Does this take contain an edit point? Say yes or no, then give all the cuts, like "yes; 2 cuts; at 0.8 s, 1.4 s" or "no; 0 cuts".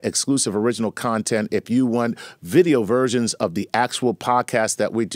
yes; 1 cut; at 3.2 s